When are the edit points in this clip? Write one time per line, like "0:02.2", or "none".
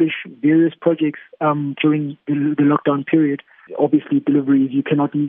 0:03.6